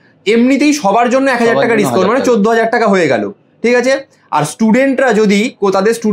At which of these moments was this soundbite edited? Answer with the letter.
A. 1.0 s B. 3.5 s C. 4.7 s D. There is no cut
D